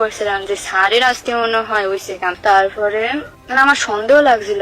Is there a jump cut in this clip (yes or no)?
no